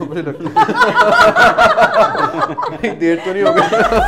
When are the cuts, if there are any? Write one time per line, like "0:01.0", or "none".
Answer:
none